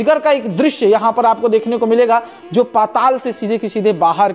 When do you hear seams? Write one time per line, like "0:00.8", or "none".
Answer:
none